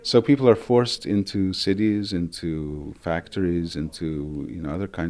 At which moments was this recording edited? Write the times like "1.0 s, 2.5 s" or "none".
none